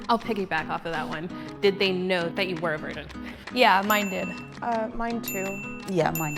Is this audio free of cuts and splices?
yes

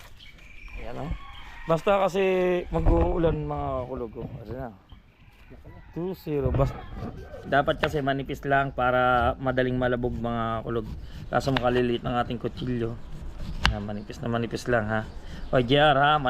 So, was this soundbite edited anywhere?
yes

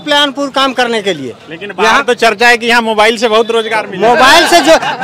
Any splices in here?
no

